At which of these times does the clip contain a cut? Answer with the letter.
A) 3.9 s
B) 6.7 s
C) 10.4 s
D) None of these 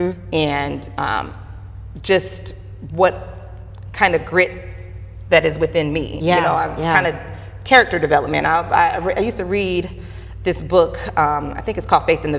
D